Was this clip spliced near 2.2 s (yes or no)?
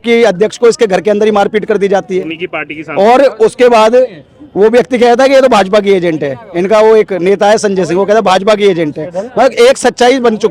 no